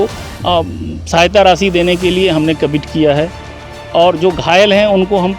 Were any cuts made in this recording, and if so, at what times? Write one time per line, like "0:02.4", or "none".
none